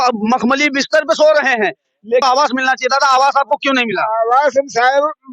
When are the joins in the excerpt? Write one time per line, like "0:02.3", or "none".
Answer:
0:02.2